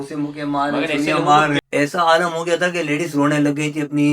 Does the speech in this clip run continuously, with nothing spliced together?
no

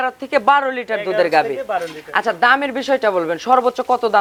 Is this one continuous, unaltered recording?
yes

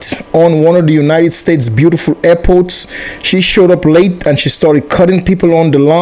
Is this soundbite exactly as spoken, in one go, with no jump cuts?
yes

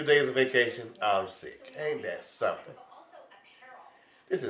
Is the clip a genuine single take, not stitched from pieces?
yes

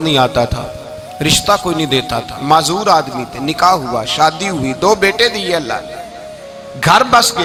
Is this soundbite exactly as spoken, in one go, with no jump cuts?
yes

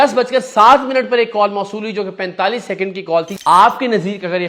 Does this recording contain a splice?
yes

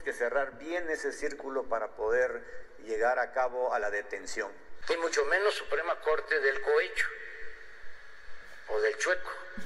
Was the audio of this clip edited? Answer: yes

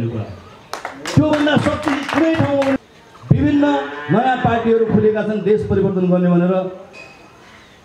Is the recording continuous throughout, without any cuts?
no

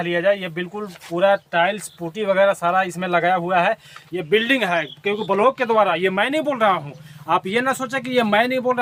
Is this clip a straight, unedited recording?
yes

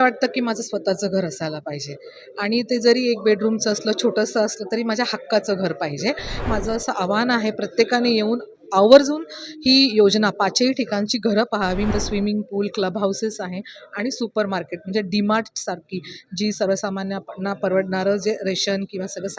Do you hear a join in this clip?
yes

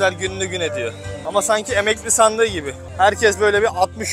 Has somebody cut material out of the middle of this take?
yes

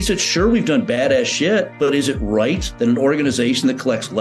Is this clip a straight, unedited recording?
no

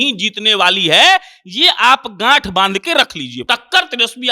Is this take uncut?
no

